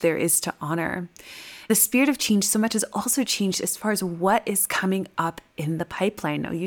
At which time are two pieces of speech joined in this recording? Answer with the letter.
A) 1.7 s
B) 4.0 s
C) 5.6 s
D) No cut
A